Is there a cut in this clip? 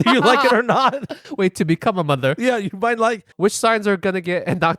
yes; 1 cut; at 3.3 s

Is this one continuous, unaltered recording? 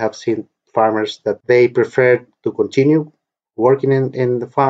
no; 1 cut; at 1.4 s

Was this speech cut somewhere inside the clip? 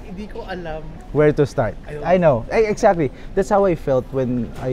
yes; 1 cut; at 1.0 s

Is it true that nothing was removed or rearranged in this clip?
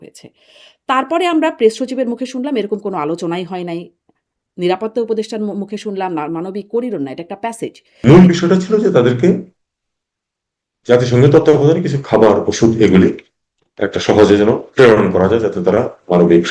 no; 1 cut; at 8.0 s

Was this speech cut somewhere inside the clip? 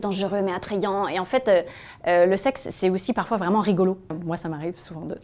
yes; 1 cut; at 4.2 s

